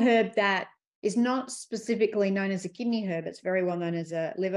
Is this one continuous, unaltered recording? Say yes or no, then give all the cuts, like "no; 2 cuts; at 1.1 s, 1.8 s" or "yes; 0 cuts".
yes; 0 cuts